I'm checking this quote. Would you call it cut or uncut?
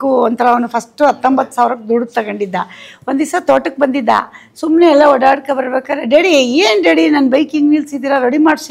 uncut